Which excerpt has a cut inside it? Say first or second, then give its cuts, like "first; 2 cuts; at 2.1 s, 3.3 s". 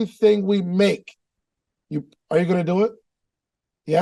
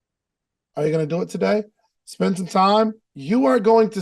second; 1 cut; at 3.1 s